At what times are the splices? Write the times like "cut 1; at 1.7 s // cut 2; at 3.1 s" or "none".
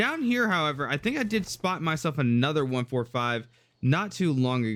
none